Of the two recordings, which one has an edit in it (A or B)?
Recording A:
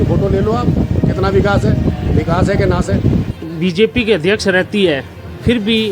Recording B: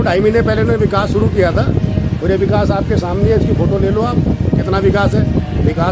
A